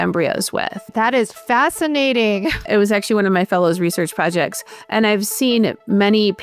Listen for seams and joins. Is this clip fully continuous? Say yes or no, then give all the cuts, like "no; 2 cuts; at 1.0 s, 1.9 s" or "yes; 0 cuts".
no; 2 cuts; at 0.9 s, 2.7 s